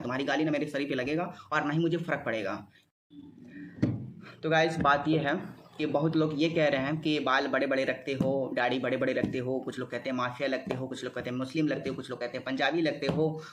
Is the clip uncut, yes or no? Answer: yes